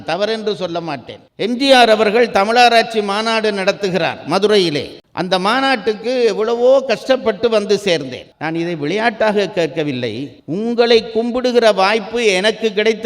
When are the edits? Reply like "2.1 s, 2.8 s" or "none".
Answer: 1.2 s, 8.2 s